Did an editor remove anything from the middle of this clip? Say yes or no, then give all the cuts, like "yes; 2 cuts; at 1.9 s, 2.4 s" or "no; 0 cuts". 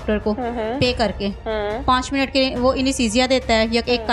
no; 0 cuts